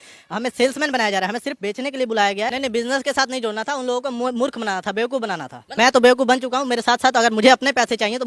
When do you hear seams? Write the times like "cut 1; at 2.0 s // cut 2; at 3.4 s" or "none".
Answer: cut 1; at 2.5 s // cut 2; at 5.6 s